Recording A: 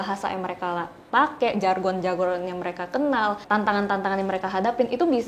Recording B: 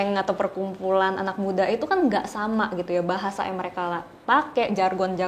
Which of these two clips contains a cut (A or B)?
A